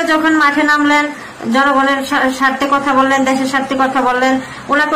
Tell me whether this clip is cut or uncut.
uncut